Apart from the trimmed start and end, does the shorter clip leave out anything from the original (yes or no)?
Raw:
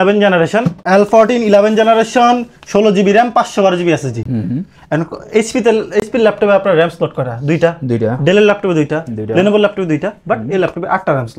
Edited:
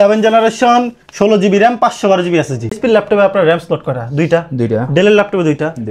yes